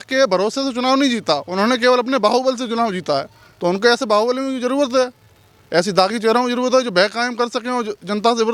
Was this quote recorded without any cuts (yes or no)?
yes